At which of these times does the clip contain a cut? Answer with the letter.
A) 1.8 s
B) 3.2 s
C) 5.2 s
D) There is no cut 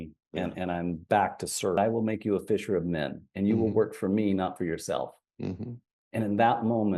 A